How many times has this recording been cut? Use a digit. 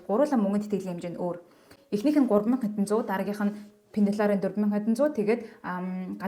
0